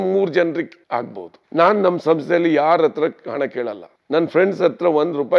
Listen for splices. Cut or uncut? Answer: uncut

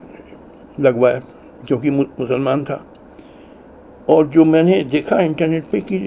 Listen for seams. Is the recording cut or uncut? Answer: uncut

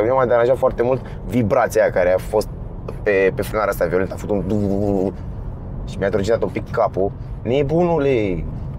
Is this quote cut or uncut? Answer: uncut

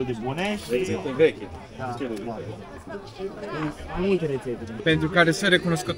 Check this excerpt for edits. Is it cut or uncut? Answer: cut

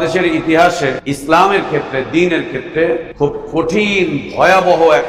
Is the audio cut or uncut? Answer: cut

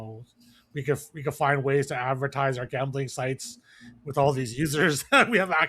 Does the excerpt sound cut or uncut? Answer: uncut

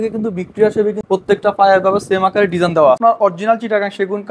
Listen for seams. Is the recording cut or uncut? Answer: cut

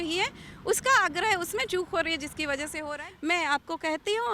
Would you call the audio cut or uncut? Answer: cut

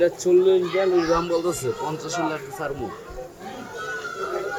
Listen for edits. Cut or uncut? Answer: uncut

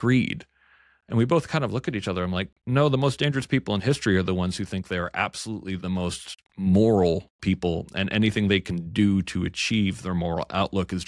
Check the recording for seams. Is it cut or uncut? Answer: uncut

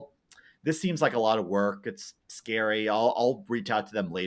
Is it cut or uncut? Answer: uncut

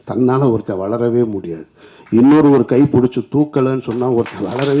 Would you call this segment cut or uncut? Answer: uncut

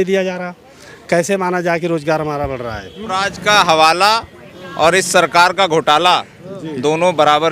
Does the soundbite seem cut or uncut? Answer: cut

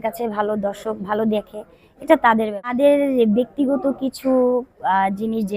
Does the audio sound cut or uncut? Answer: cut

